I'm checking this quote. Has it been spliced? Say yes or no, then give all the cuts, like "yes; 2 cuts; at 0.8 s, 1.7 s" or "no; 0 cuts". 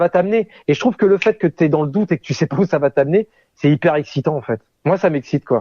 no; 0 cuts